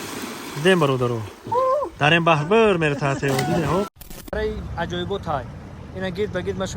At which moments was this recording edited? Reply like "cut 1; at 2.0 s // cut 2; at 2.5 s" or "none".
cut 1; at 4.3 s